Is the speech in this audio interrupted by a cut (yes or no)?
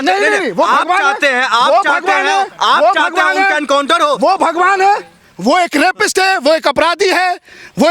no